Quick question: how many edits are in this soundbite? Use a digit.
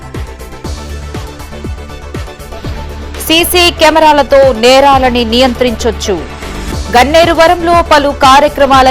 2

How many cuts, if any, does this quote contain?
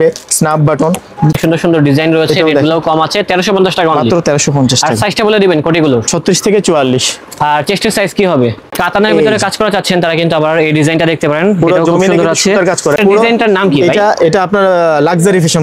3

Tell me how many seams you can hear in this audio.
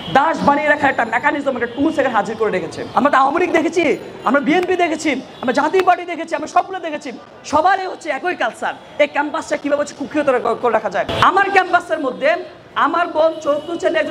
2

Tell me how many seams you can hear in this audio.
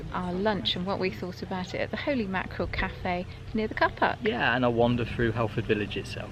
0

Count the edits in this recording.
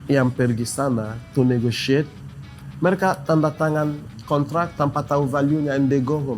1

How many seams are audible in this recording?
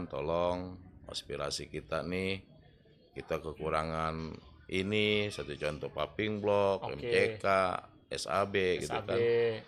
0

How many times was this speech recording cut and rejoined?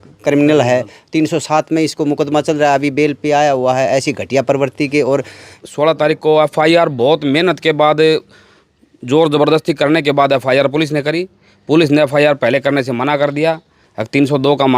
1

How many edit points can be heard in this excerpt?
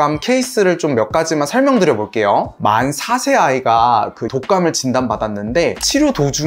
2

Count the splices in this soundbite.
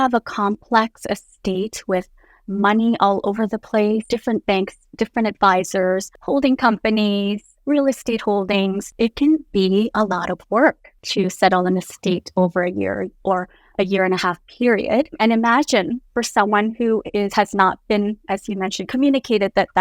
5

